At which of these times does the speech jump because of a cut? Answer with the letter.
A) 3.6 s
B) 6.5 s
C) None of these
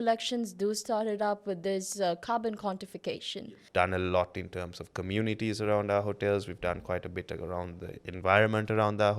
A